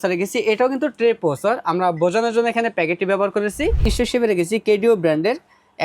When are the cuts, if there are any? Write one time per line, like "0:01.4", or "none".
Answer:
0:03.9